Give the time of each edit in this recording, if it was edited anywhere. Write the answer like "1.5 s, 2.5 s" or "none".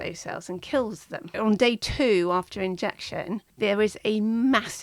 1.3 s, 3.5 s